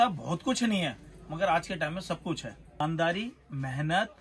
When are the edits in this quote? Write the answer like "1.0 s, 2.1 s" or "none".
2.8 s

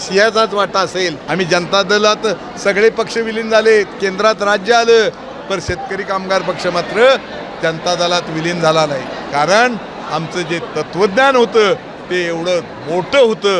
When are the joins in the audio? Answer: 1.2 s, 9.2 s

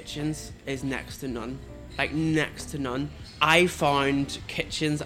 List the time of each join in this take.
3.2 s

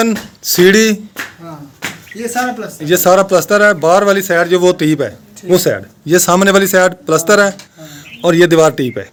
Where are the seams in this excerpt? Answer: none

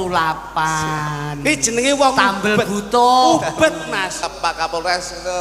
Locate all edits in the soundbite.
4.3 s

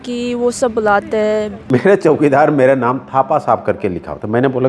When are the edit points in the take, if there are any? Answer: 1.6 s

